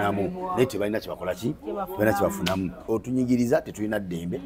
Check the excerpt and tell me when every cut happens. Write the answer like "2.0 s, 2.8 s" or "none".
2.8 s